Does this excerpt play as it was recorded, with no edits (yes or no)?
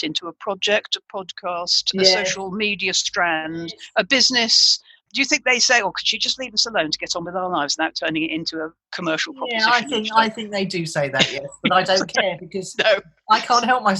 no